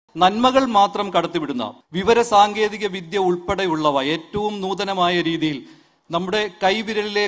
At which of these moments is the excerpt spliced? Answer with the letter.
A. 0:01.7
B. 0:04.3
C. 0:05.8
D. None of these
A